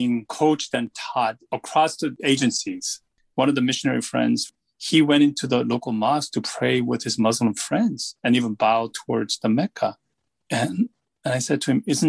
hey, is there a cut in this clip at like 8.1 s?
no; 2 cuts; at 3.1 s, 4.5 s

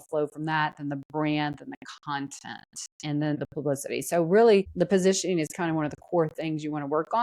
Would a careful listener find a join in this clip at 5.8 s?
no; 1 cut; at 3.4 s

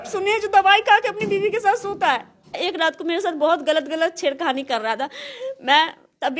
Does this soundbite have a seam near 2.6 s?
yes; 1 cut; at 2.6 s

